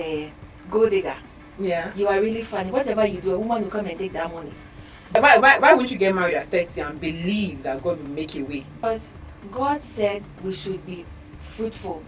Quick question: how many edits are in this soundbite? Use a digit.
2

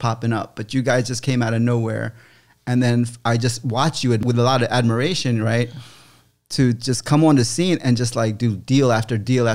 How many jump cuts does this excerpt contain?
1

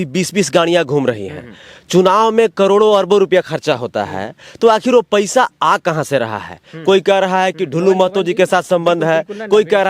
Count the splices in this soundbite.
0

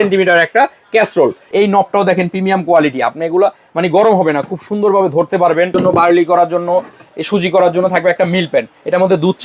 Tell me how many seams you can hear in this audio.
2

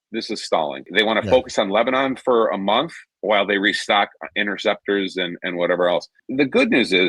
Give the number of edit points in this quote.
2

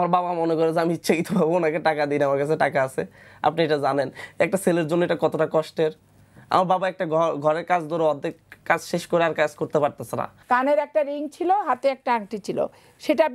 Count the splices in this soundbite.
1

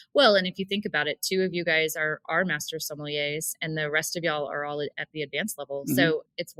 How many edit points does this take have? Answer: 0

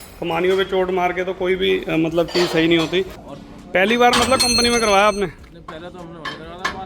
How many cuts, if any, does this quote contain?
1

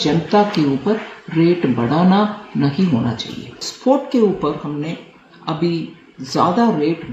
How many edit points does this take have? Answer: 1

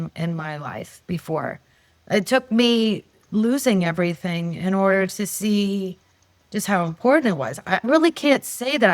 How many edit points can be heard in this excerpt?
1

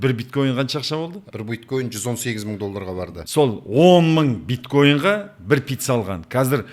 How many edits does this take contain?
2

